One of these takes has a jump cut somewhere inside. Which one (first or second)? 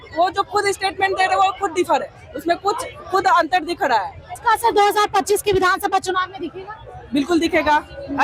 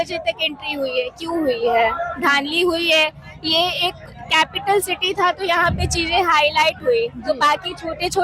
first